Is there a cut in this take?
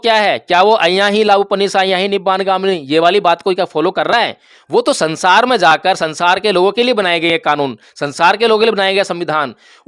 no; 0 cuts

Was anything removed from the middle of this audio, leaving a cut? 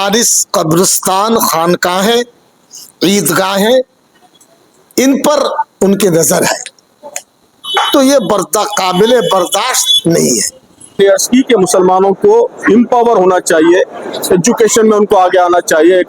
yes; 1 cut; at 11.0 s

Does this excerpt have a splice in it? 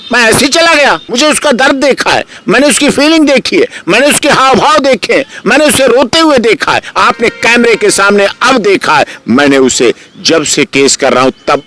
yes; 1 cut; at 1.1 s

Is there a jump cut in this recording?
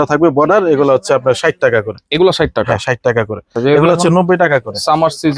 yes; 1 cut; at 3.5 s

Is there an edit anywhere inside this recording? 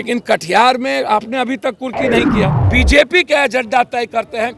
yes; 1 cut; at 2.6 s

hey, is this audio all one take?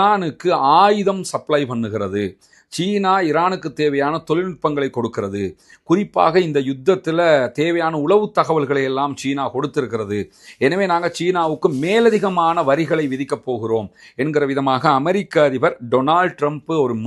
yes; 0 cuts

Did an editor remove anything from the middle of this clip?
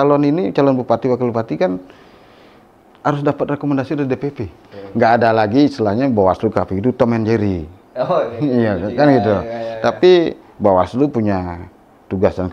yes; 1 cut; at 4.8 s

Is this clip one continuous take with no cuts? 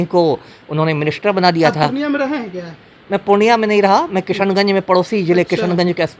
yes; 0 cuts

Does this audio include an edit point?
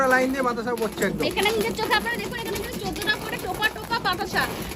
no; 0 cuts

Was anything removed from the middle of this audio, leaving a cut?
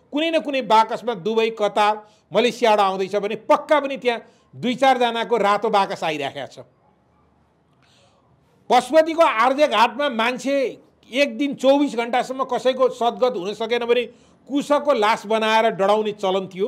no; 0 cuts

